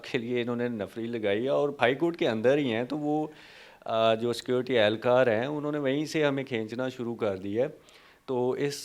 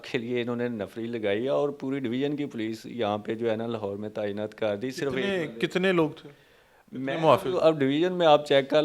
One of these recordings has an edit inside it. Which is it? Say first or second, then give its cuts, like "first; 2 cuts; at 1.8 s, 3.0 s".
first; 1 cut; at 1.7 s